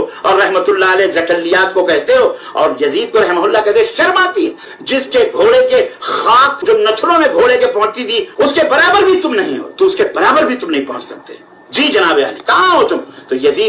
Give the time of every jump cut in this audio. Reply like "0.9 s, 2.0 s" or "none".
4.7 s, 6.6 s, 8.2 s